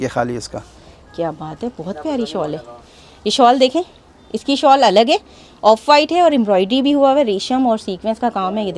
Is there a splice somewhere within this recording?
no; 0 cuts

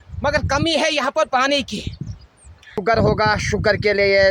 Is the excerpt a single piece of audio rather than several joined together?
no; 1 cut; at 2.8 s

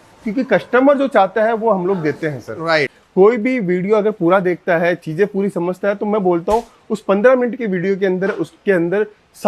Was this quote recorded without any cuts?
no; 1 cut; at 2.6 s

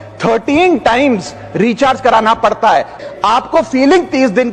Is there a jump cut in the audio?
yes; 1 cut; at 3.0 s

